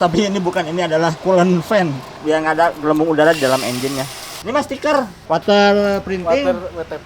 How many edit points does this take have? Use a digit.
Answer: 2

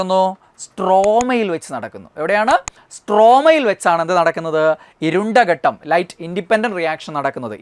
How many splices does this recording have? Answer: 0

